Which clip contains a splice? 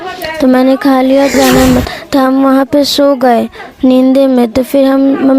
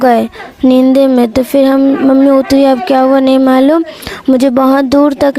first; 1 cut; at 1.3 s

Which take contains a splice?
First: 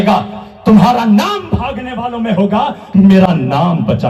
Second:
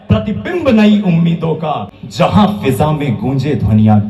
second; 1 cut; at 2.0 s

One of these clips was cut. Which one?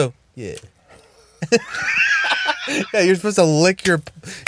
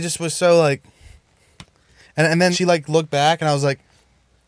second; 1 cut; at 2.5 s

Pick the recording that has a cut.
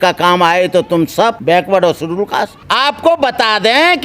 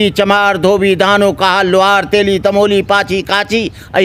first; 2 cuts; at 1.4 s, 2.6 s

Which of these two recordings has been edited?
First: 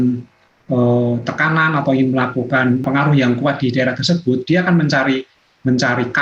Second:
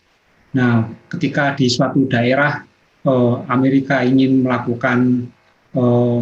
first; 1 cut; at 2.8 s

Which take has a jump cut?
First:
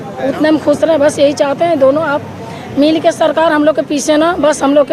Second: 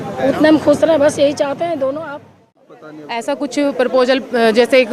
second; 1 cut; at 2.6 s

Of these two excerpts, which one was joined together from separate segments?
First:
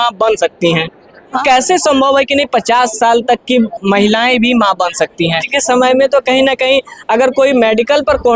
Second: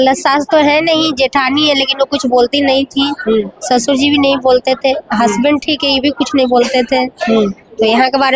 first; 2 cuts; at 1.4 s, 5.4 s

